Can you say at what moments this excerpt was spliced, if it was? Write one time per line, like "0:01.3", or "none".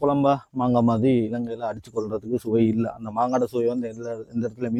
none